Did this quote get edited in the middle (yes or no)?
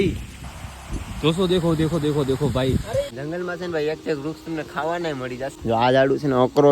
yes